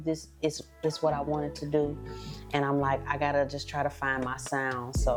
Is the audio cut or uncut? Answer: uncut